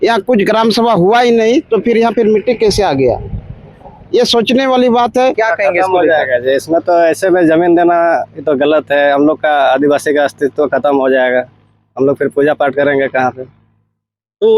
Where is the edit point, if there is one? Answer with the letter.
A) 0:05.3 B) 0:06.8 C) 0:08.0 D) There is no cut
A